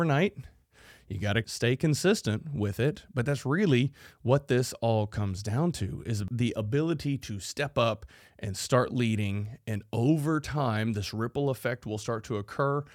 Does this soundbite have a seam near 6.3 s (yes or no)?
yes